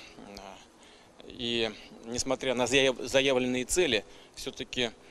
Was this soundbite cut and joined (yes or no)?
no